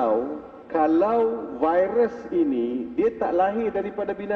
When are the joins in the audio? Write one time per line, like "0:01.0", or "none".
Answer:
none